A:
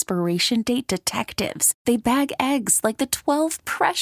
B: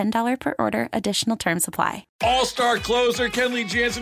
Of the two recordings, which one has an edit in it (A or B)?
B